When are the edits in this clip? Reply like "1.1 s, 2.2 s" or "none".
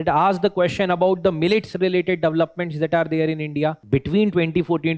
3.8 s

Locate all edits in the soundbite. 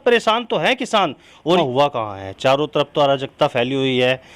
1.6 s

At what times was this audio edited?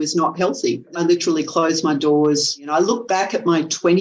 0.9 s, 2.7 s

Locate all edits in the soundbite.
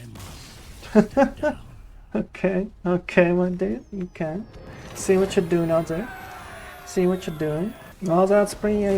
7.9 s

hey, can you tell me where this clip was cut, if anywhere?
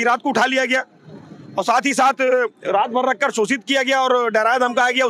none

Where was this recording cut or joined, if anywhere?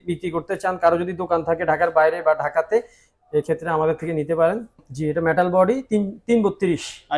4.8 s

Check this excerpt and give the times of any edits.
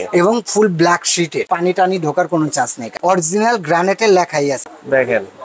1.4 s, 2.8 s, 4.6 s

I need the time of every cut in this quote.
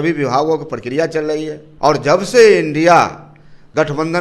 1.6 s

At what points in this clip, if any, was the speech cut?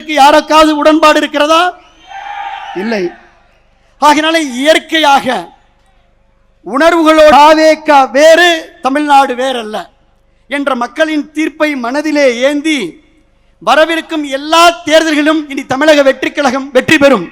7.3 s

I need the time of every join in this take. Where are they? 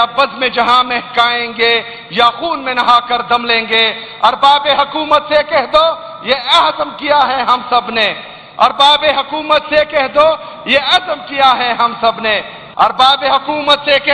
12.6 s

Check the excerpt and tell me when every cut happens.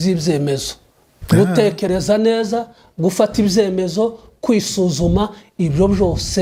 none

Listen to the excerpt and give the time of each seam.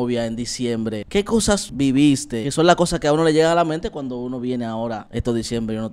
1.2 s, 2.5 s, 5.0 s

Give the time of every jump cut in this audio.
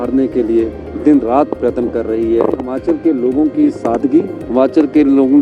2.7 s

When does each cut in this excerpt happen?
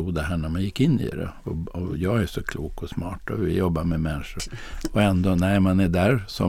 4.5 s

